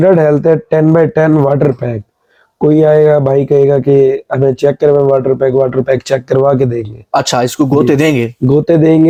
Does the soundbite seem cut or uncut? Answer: uncut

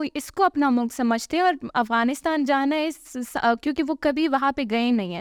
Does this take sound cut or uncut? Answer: uncut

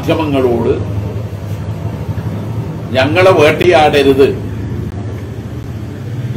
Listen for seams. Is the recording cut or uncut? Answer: uncut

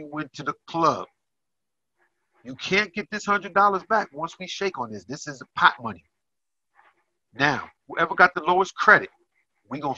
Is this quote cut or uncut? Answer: uncut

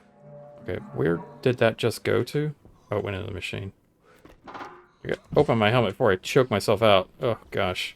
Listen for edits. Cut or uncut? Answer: uncut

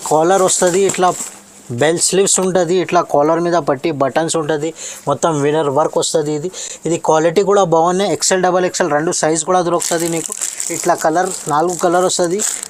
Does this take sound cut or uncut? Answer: uncut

